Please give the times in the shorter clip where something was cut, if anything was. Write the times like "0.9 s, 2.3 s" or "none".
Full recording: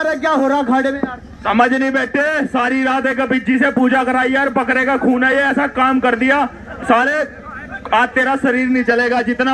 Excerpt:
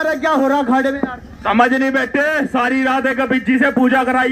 none